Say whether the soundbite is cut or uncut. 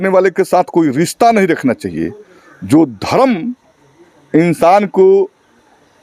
uncut